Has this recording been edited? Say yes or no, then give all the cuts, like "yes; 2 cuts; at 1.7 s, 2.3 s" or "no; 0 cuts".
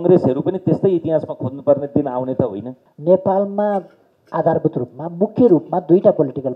yes; 1 cut; at 2.8 s